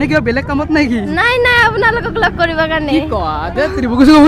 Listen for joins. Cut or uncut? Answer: uncut